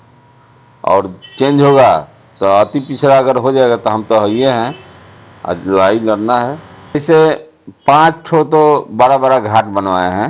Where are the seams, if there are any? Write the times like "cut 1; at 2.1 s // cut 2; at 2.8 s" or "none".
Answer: cut 1; at 7.0 s